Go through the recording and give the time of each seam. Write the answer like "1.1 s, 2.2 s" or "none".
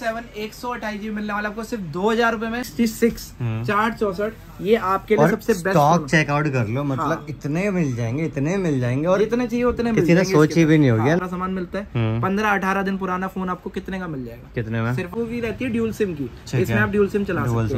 2.7 s, 11.2 s, 15.1 s